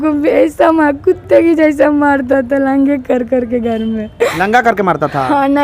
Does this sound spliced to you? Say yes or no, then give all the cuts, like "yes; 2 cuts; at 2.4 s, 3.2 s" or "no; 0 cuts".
no; 0 cuts